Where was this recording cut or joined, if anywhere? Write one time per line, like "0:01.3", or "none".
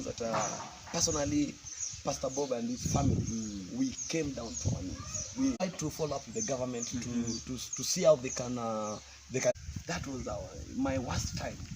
0:05.6
0:09.5

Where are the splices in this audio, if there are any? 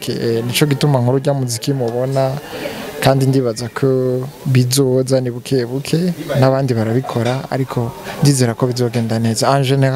none

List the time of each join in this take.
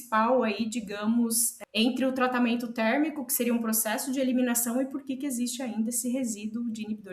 0:01.5

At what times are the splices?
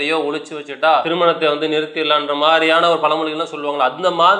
0:01.1

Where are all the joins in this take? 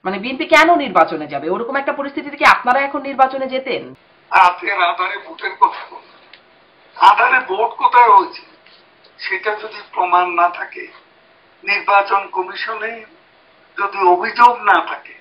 0:03.9

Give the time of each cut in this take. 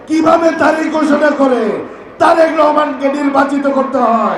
none

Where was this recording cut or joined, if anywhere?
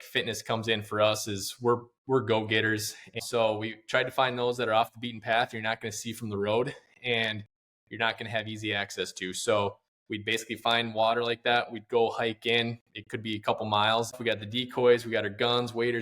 0:03.2
0:14.2

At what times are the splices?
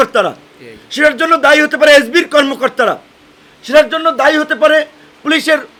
none

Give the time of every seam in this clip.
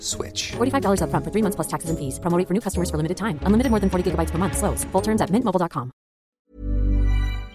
0:06.4

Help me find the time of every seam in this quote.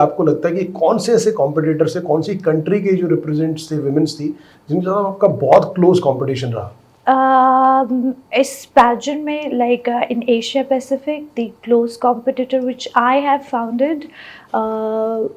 none

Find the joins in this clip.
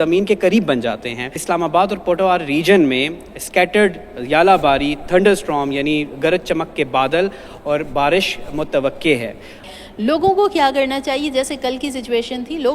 0:01.4
0:09.7

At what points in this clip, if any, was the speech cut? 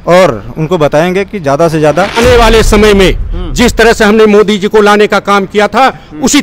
0:02.1

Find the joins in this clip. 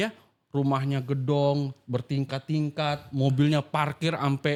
none

